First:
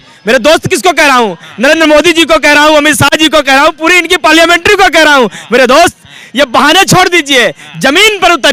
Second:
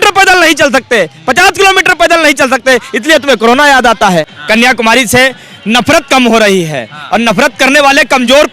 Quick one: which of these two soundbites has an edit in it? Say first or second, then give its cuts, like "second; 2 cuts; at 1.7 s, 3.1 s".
second; 1 cut; at 4.4 s